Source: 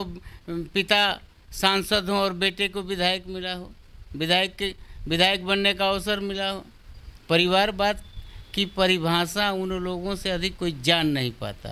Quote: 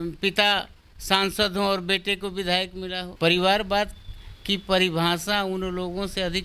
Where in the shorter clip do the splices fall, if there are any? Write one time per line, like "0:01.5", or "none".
0:03.0